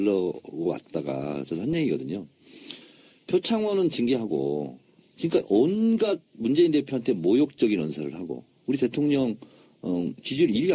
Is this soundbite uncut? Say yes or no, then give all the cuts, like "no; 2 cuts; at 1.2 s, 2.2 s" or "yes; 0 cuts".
yes; 0 cuts